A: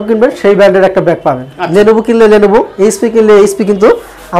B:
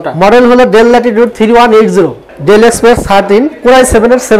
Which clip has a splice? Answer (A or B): B